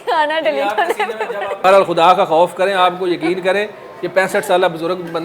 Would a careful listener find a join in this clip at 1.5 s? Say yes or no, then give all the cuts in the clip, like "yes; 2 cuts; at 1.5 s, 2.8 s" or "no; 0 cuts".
yes; 1 cut; at 1.5 s